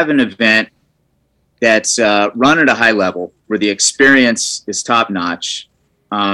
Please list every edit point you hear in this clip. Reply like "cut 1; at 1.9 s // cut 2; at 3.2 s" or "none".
none